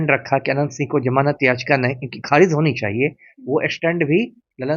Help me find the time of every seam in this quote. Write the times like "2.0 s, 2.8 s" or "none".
none